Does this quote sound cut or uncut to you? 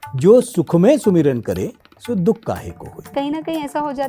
cut